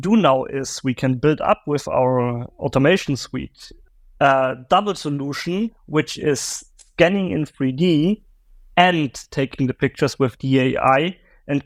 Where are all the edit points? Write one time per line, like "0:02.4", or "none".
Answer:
none